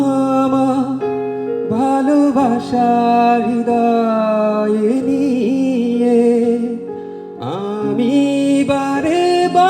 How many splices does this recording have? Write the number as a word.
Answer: zero